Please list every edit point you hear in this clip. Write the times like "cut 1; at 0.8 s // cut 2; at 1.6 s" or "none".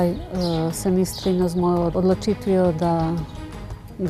cut 1; at 1.8 s